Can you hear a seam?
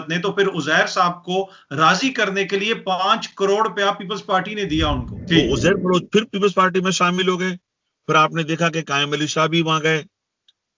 yes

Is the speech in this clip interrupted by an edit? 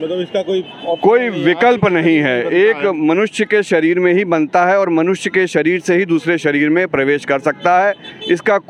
no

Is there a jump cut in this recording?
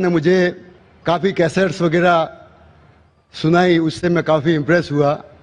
yes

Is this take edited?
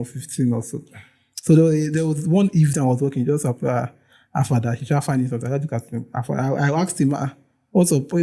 no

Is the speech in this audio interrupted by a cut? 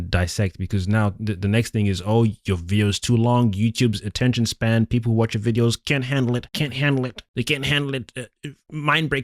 no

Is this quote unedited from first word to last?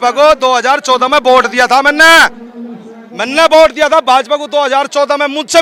yes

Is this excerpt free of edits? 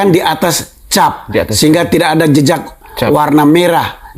yes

